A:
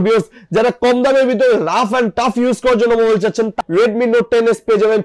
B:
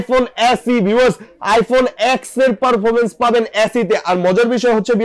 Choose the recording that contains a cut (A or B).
A